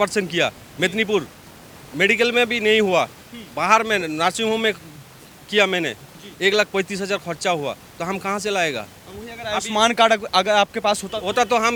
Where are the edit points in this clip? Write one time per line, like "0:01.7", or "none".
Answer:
none